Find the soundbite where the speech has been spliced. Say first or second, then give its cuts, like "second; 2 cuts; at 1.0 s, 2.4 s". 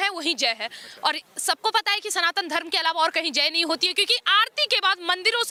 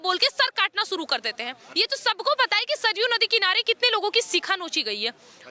second; 1 cut; at 1.6 s